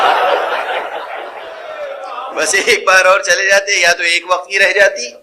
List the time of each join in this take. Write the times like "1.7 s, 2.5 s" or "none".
1.7 s